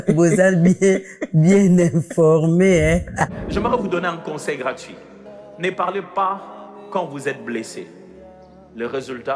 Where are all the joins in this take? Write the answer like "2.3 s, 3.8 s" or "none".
3.4 s